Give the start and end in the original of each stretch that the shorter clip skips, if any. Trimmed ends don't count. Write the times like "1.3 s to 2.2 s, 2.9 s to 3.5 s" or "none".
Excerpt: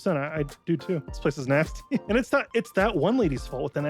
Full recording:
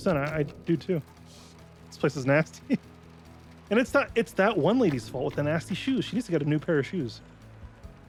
1.1 s to 1.9 s, 2.8 s to 3.7 s